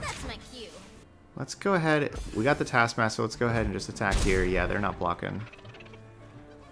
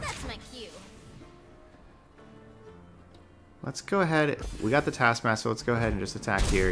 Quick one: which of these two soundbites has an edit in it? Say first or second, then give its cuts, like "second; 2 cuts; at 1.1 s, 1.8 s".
first; 1 cut; at 1.1 s